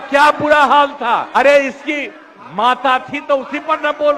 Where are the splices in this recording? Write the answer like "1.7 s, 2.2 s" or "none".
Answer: 1.3 s